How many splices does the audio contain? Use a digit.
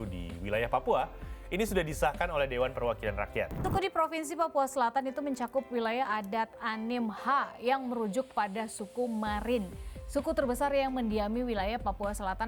1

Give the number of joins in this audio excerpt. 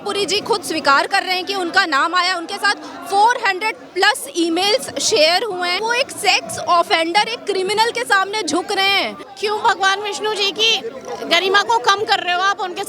2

